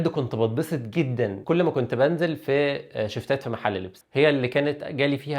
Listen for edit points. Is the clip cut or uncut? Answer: cut